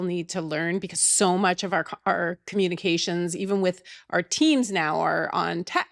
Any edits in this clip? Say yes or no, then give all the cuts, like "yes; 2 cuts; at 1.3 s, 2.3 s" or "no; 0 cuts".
no; 0 cuts